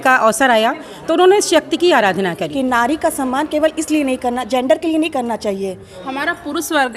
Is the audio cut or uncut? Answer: cut